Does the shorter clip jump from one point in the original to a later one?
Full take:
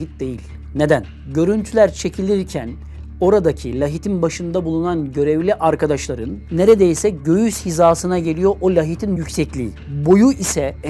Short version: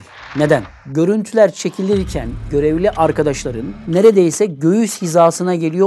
yes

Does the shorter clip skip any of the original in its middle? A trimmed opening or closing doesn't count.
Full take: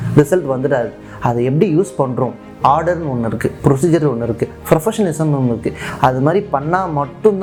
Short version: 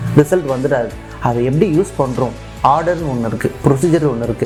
no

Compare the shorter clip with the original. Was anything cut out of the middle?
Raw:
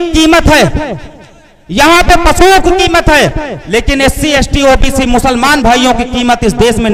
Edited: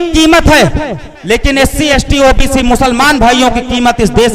yes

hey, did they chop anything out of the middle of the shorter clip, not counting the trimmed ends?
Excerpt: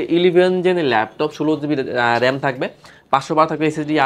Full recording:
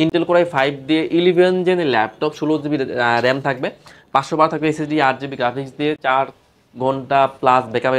no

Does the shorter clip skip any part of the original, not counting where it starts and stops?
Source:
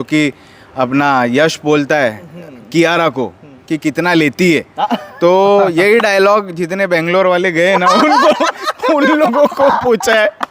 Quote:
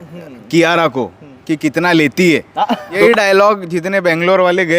yes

